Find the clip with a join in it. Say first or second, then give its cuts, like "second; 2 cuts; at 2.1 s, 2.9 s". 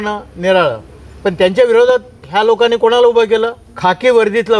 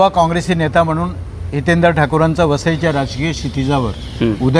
first; 2 cuts; at 2.2 s, 3.6 s